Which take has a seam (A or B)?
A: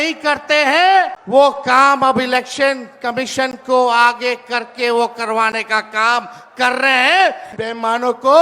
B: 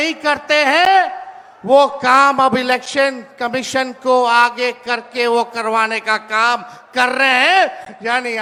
A